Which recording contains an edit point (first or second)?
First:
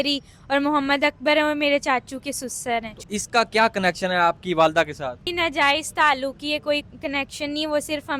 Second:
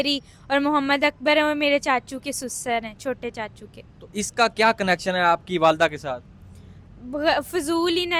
first